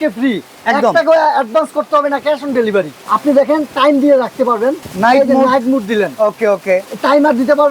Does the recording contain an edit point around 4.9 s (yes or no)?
yes